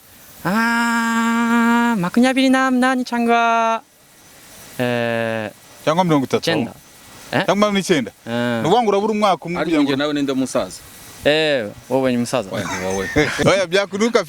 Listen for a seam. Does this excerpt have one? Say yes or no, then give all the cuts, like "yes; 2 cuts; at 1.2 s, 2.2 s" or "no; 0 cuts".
yes; 1 cut; at 13.4 s